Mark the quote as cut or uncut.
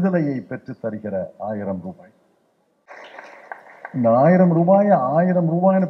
cut